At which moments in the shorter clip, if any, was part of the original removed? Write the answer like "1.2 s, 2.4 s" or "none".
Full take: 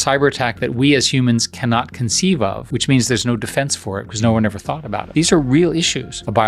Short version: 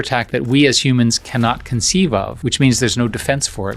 none